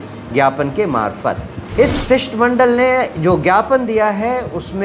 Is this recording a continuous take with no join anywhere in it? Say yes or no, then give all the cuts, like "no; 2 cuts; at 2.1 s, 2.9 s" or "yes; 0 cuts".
no; 1 cut; at 1.5 s